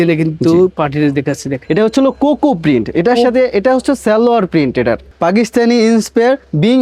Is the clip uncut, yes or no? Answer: no